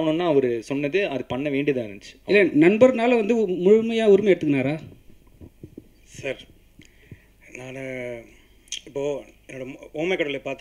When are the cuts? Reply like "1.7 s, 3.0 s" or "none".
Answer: none

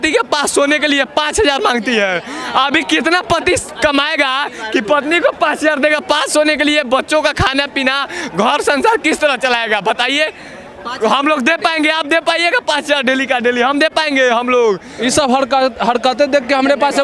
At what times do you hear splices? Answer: none

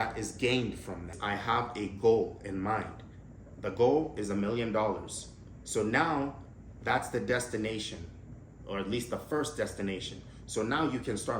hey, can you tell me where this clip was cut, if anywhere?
1.2 s

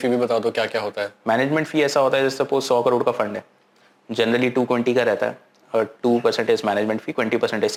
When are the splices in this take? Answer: none

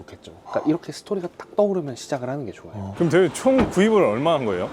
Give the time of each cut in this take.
2.8 s

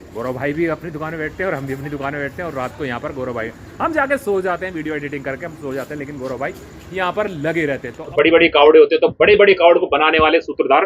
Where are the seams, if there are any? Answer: 8.1 s

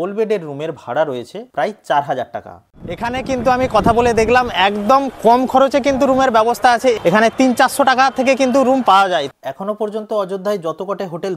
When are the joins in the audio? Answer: 3.0 s, 7.0 s, 9.3 s

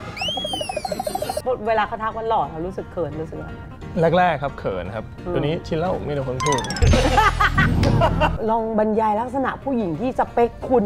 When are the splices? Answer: 1.4 s, 8.3 s

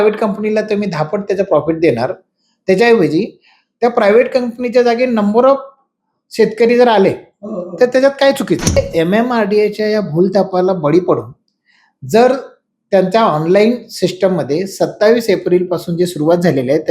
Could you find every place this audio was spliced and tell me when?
8.8 s

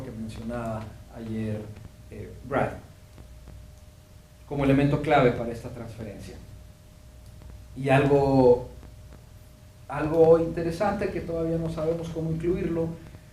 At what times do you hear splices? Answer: 9.6 s

